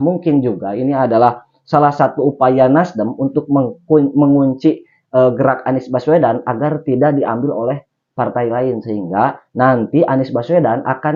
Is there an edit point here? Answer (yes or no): no